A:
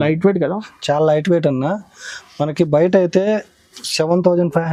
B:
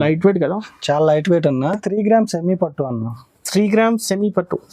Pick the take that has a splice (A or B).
B